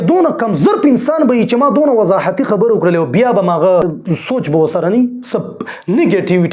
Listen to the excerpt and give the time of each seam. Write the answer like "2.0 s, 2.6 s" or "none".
4.0 s